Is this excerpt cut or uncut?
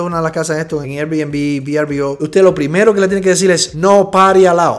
uncut